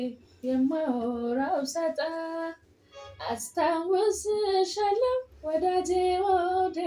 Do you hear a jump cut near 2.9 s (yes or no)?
no